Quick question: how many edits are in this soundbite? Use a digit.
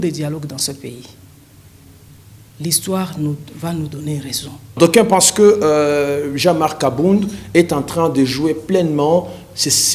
1